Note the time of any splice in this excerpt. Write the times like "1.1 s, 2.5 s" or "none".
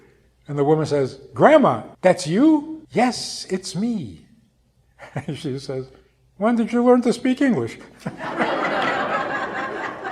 1.9 s, 2.8 s